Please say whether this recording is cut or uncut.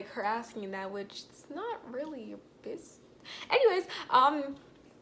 uncut